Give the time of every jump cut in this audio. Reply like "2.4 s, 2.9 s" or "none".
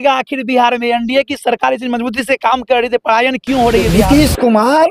3.9 s